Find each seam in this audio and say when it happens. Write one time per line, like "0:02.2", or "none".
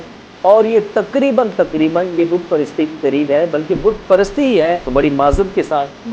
0:04.8